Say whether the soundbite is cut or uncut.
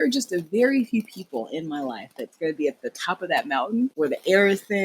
cut